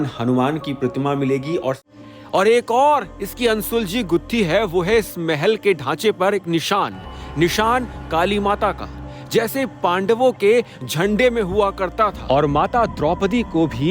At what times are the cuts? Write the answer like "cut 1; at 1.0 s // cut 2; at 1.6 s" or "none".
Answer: cut 1; at 1.8 s